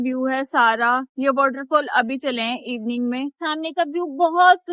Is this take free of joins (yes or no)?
no